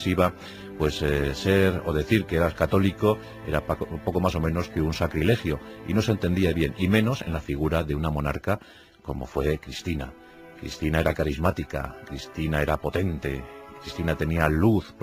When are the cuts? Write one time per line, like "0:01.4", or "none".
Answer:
0:11.2